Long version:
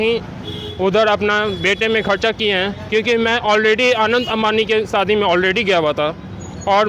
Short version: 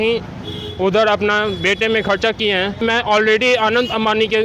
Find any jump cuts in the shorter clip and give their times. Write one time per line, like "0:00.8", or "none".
0:02.8